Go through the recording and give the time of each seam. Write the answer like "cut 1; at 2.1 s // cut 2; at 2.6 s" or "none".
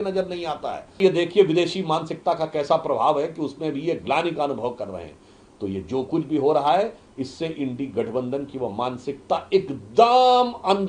cut 1; at 1.0 s